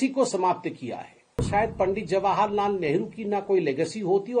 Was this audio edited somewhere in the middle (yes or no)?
yes